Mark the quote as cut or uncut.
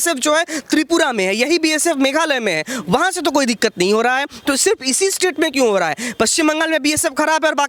uncut